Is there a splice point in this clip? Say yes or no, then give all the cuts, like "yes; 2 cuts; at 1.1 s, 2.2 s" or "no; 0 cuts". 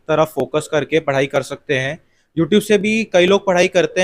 no; 0 cuts